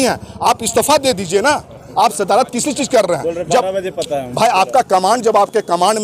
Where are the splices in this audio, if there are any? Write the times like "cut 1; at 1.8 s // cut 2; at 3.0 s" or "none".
cut 1; at 1.8 s